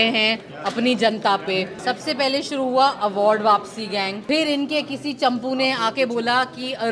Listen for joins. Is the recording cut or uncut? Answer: cut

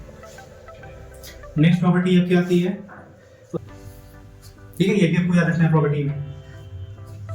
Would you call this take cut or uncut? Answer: cut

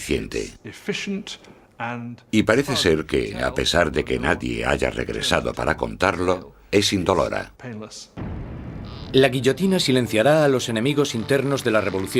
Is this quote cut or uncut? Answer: uncut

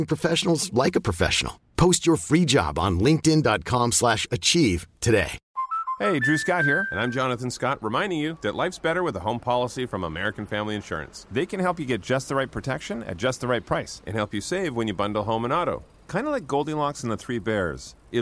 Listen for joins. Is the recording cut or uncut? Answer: uncut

